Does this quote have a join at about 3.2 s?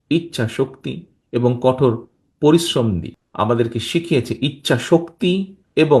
yes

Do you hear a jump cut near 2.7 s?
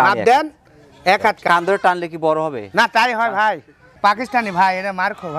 no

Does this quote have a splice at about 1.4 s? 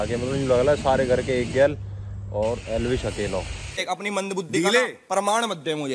no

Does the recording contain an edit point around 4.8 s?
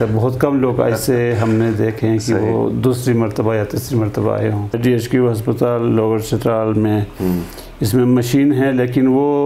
yes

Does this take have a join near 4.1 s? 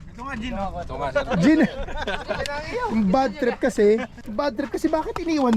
yes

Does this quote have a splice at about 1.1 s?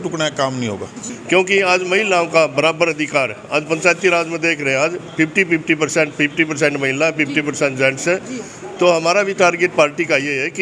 yes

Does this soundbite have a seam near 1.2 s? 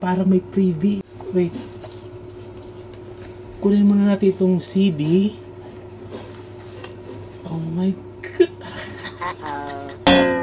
yes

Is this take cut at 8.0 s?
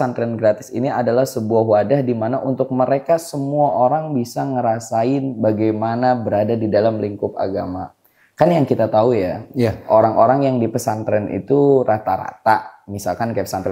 no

